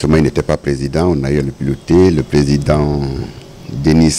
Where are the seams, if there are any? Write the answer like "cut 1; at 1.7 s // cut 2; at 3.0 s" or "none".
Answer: none